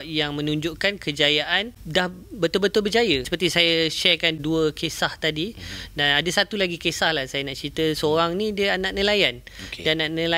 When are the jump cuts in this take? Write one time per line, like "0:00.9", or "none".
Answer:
0:01.7
0:03.3
0:04.4